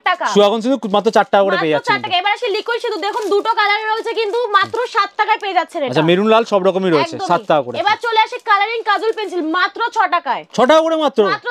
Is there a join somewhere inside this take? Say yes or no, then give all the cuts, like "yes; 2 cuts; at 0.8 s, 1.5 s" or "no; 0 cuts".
no; 0 cuts